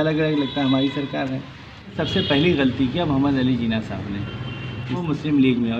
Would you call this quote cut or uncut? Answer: cut